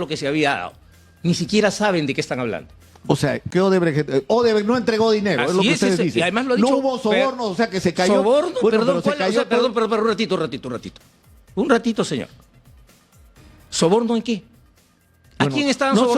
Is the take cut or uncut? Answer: cut